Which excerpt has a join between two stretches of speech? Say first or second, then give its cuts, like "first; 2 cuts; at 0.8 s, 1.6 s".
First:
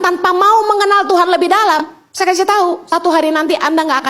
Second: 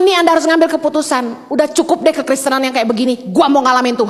first; 2 cuts; at 1.8 s, 2.8 s